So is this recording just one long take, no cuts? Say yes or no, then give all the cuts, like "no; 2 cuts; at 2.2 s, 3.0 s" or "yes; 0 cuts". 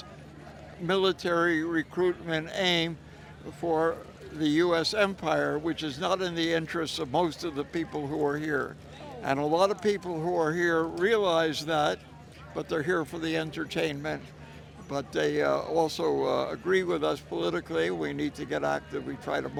yes; 0 cuts